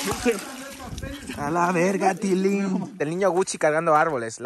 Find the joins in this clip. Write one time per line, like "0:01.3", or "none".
0:03.1